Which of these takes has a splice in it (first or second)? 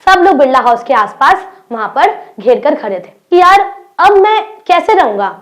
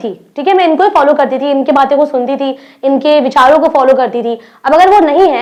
first